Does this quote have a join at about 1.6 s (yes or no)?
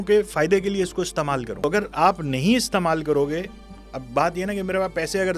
yes